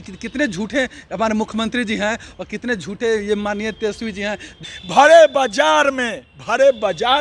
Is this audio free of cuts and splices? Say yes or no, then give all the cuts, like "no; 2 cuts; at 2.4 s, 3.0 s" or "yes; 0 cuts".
no; 1 cut; at 4.6 s